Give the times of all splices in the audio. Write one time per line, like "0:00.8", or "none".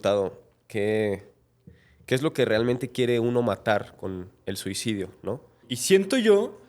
0:05.7

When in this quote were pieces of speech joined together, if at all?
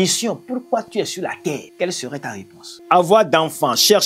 0:01.7
0:02.7

